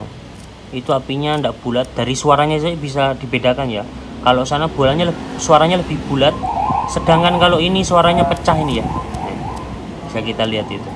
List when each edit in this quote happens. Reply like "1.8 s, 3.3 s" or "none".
none